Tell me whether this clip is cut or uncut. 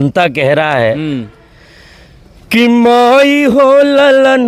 uncut